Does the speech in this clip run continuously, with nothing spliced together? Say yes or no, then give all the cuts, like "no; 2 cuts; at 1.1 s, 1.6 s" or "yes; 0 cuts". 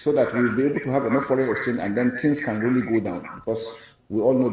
yes; 0 cuts